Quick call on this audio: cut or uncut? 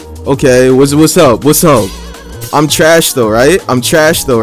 uncut